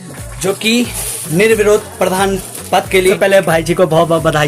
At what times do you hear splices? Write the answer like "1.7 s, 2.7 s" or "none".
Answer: 1.0 s, 3.2 s